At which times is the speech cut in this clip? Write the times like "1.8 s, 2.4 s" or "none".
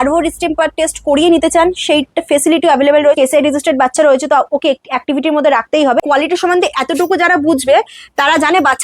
3.2 s, 6.0 s